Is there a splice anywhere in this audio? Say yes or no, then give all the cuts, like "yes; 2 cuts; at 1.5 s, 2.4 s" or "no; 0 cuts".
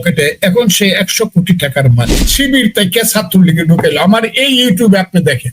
yes; 1 cut; at 2.2 s